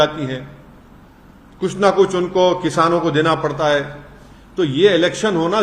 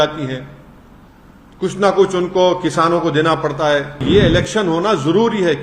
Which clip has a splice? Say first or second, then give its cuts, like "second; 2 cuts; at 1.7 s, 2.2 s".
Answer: second; 1 cut; at 4.0 s